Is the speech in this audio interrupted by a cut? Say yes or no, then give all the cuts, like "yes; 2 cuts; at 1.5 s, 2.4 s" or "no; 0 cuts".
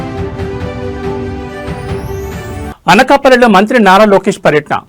yes; 1 cut; at 2.6 s